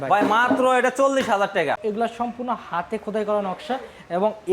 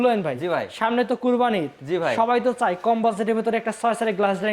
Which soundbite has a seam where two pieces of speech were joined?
first; 1 cut; at 1.4 s

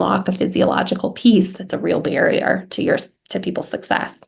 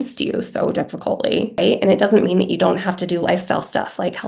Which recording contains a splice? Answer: second; 1 cut; at 1.6 s

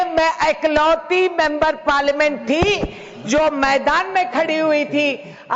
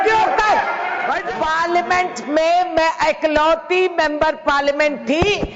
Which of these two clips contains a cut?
second; 1 cut; at 1.2 s

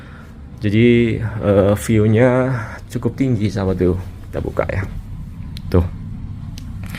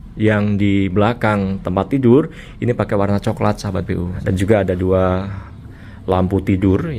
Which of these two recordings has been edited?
second; 1 cut; at 4.2 s

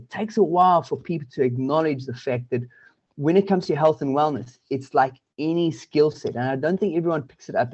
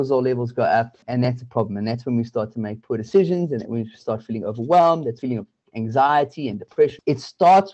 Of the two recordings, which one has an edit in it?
second; 3 cuts; at 1.0 s, 5.2 s, 7.0 s

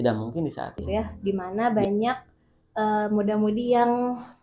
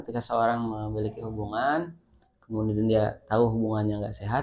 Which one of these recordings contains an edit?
first; 1 cut; at 1.1 s

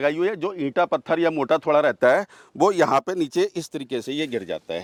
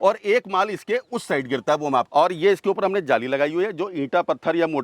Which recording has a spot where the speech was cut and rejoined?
second; 1 cut; at 2.1 s

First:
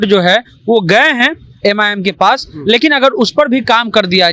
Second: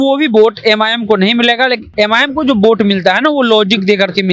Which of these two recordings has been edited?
second; 1 cut; at 1.8 s

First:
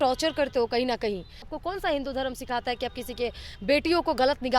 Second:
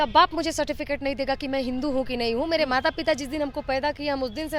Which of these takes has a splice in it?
first; 1 cut; at 1.5 s

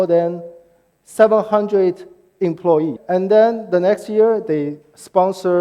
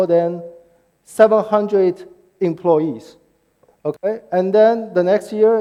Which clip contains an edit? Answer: first; 1 cut; at 3.0 s

